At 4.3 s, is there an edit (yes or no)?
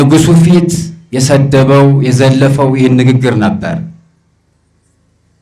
no